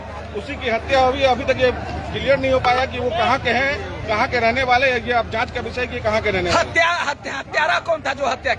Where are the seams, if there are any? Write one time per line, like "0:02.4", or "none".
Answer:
none